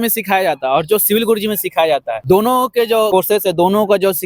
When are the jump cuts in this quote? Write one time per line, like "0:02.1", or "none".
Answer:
0:02.1
0:03.1